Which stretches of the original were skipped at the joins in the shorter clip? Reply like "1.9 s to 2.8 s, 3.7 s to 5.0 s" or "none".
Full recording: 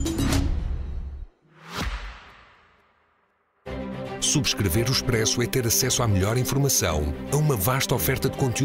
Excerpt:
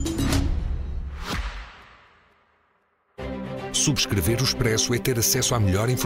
1.1 s to 1.5 s